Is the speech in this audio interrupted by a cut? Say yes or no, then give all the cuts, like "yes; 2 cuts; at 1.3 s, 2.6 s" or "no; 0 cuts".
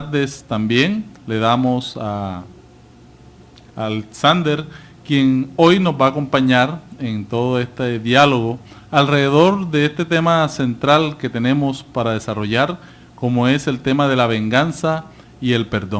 yes; 1 cut; at 5.3 s